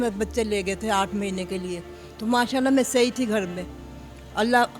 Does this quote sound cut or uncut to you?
uncut